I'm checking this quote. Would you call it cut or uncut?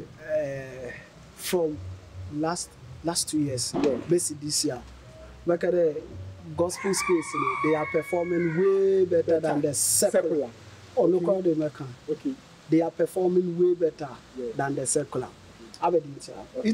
uncut